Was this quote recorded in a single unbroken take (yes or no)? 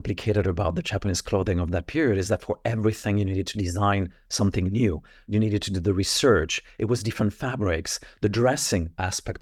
yes